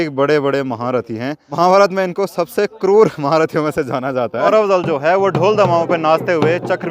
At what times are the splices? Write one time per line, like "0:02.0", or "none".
0:01.4
0:04.5